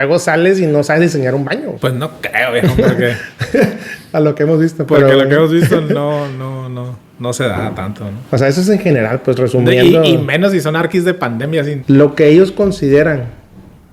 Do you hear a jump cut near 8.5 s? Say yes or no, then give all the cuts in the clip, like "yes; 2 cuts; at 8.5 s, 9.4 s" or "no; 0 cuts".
no; 2 cuts; at 1.7 s, 11.1 s